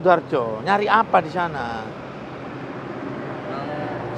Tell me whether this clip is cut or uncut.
uncut